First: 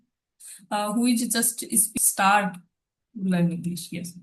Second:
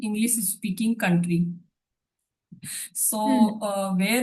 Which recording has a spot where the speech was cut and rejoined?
first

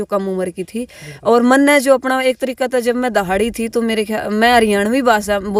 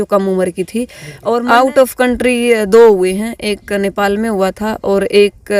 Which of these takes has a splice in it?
second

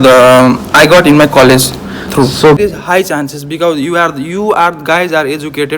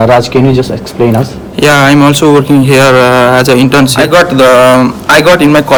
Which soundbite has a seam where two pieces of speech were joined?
first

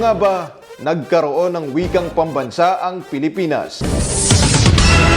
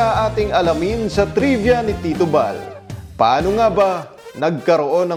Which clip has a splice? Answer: first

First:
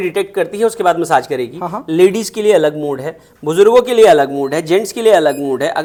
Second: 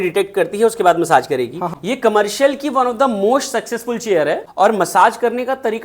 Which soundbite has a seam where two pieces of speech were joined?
second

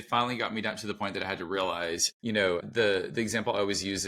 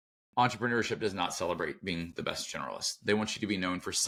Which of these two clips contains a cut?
first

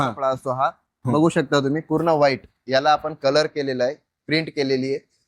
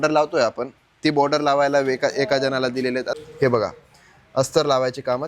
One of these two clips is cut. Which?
second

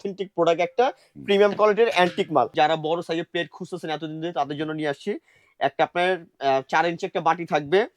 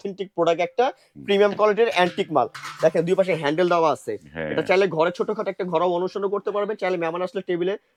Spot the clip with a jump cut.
first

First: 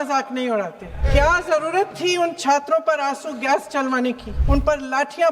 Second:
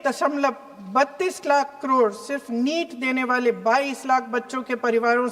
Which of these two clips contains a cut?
first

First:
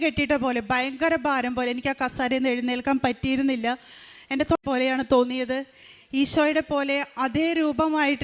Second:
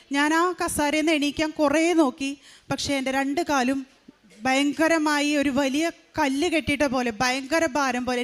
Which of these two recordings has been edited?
first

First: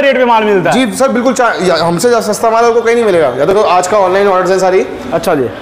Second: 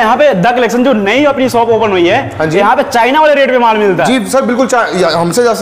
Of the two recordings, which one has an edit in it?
first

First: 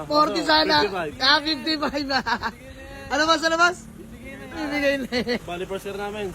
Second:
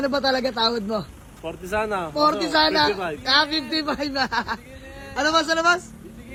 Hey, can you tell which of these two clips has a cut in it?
first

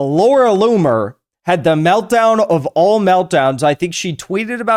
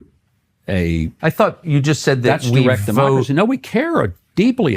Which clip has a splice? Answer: second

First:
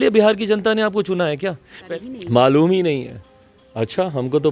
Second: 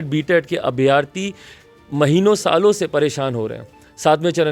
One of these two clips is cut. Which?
first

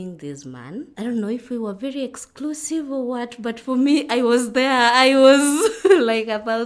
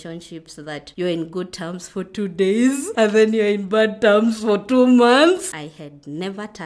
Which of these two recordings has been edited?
second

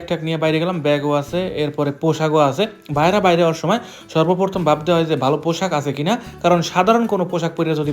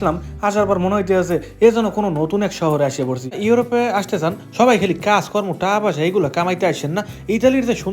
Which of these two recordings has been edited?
second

